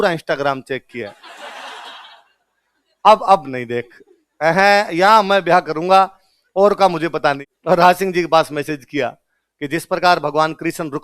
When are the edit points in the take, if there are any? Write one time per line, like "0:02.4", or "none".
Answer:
0:07.5

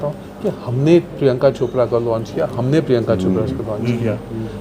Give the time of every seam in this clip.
none

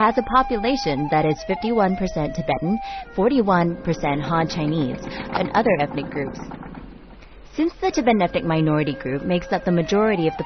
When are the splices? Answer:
none

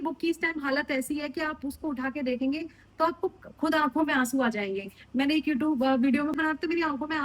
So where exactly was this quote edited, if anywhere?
0:06.4

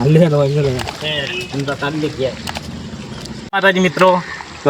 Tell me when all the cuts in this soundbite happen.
0:01.0
0:03.5

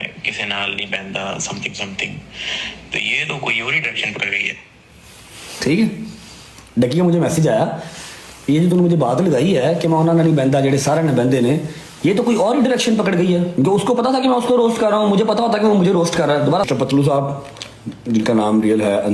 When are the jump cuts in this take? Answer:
0:16.7

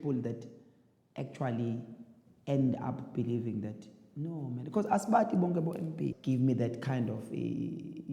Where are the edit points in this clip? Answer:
0:06.2

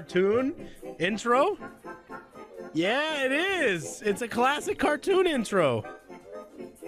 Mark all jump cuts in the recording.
none

